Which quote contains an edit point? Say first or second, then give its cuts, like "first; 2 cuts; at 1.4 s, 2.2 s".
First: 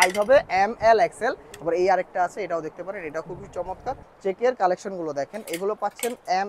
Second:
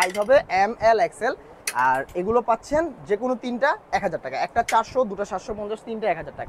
first; 2 cuts; at 1.5 s, 4.1 s